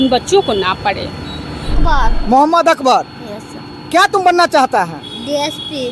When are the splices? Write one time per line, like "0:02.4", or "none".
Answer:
0:01.8